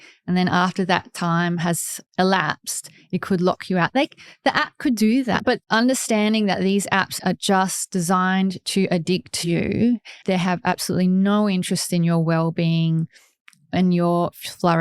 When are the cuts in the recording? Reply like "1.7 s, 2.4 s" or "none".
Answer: 5.4 s